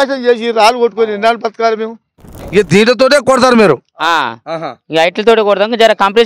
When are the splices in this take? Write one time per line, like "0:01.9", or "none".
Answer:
0:02.4